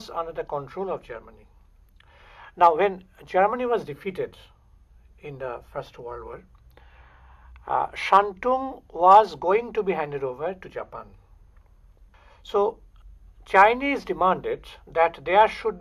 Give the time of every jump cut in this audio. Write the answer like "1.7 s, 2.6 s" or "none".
none